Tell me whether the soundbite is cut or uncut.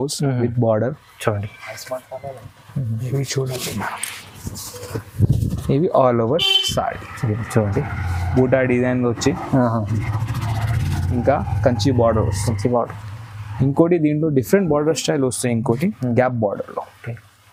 uncut